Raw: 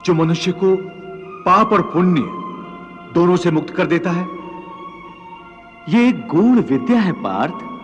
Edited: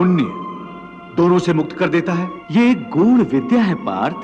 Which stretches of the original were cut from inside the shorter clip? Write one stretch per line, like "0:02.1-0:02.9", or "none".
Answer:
0:04.3-0:05.7